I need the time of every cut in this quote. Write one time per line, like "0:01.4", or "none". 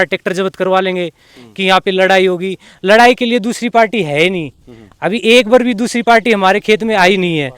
none